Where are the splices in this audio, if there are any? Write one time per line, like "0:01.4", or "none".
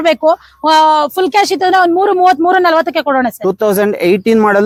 none